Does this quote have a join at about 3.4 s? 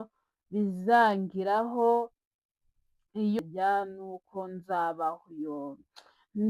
yes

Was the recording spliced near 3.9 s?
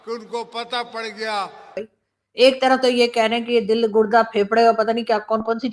no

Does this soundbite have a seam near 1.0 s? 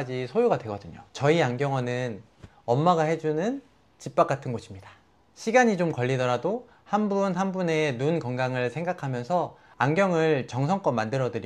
yes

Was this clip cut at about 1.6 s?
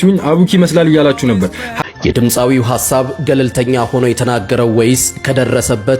yes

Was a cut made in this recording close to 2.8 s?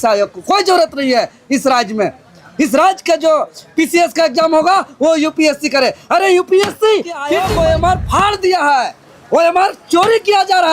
no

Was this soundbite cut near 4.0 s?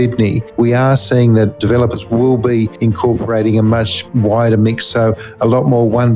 yes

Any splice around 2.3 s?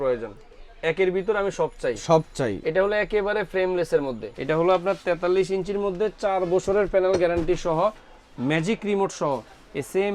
no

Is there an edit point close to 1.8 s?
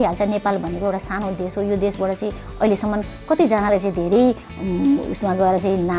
no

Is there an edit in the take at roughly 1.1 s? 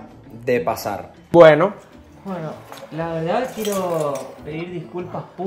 yes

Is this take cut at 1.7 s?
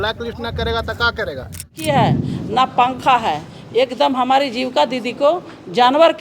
yes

